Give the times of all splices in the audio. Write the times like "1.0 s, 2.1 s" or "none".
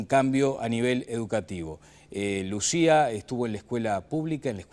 3.6 s